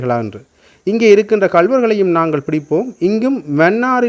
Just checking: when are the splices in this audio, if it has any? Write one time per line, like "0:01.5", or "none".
none